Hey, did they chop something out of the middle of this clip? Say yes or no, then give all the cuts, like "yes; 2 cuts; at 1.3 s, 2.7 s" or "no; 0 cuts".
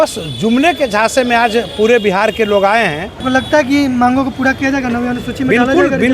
yes; 1 cut; at 3.1 s